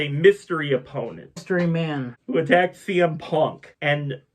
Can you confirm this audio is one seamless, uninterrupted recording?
no; 1 cut; at 2.1 s

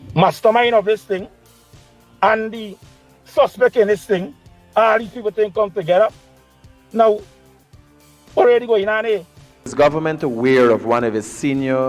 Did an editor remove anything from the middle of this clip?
yes; 1 cut; at 9.6 s

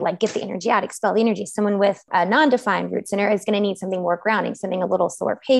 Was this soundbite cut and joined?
yes; 1 cut; at 2.0 s

